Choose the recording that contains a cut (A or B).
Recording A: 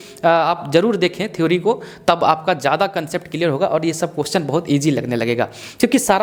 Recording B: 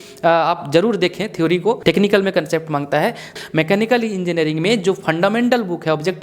B